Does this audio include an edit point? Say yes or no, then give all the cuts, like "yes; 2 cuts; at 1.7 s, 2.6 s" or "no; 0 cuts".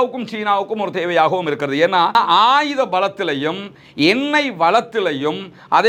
no; 0 cuts